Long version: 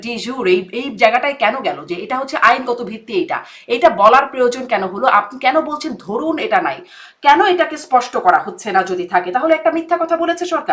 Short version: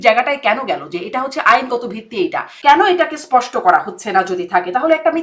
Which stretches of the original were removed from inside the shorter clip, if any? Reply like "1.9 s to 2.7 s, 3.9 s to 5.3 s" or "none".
3.4 s to 7.1 s